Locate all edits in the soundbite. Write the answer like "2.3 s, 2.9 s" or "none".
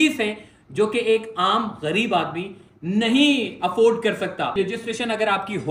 4.5 s